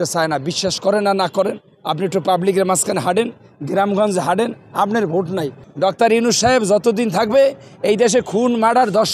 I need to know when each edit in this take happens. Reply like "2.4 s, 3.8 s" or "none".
5.6 s